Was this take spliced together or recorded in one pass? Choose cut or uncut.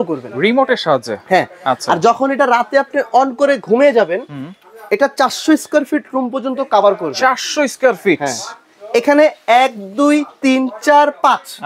uncut